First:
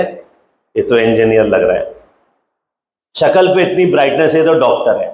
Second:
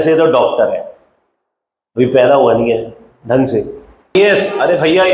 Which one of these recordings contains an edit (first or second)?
second